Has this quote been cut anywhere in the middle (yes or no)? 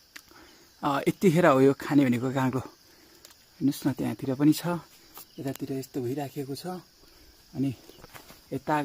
no